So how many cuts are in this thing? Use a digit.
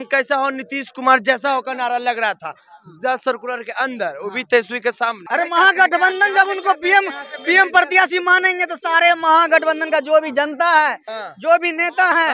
1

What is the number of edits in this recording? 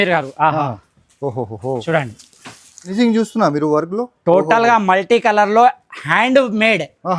1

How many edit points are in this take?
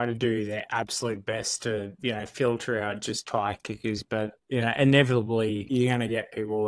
1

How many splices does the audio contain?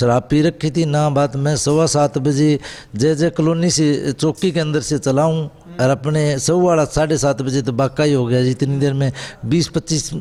0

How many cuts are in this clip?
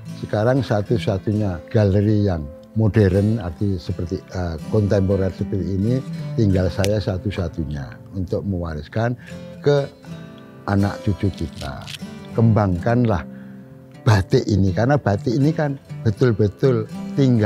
2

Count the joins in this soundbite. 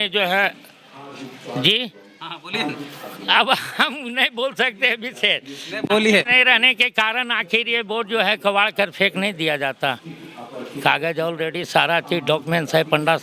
0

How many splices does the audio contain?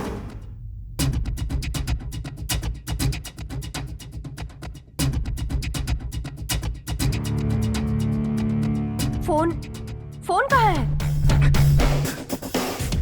1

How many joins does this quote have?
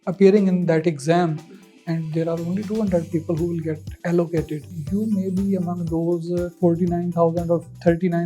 2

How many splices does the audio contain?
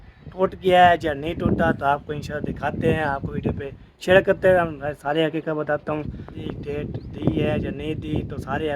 1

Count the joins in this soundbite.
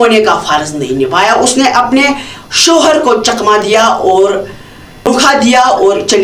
1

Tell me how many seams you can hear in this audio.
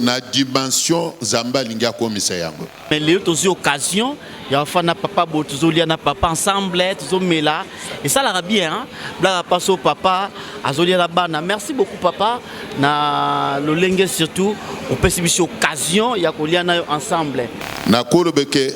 2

